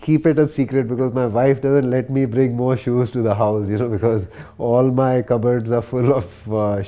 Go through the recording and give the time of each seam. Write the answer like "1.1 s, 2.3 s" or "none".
none

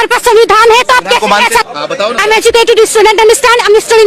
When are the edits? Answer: 1.8 s

